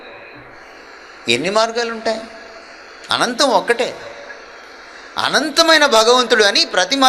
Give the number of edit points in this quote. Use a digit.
0